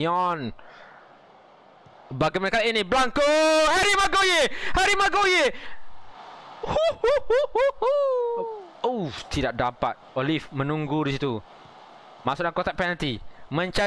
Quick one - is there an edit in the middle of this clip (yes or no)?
yes